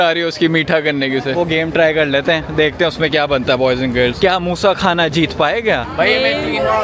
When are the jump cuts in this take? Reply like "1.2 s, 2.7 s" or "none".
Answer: 1.3 s, 5.8 s